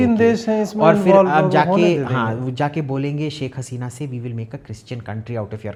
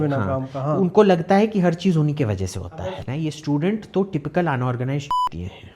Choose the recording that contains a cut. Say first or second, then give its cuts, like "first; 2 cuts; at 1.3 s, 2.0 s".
second; 1 cut; at 2.7 s